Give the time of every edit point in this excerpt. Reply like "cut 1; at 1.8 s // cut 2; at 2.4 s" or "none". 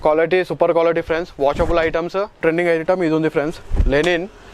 cut 1; at 2.4 s